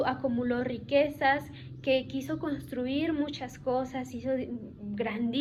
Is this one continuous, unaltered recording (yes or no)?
yes